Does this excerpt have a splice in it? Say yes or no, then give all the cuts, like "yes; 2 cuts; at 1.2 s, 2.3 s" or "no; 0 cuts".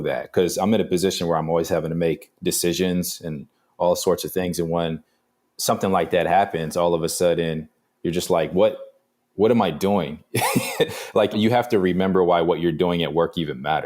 yes; 1 cut; at 11.3 s